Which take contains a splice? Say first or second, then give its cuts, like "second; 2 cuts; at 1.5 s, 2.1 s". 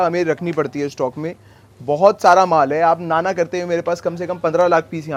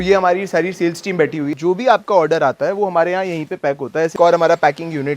second; 2 cuts; at 1.6 s, 4.1 s